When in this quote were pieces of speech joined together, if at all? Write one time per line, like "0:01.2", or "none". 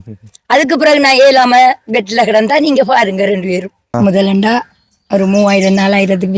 0:03.9